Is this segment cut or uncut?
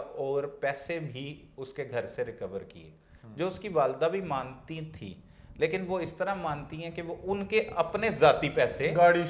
uncut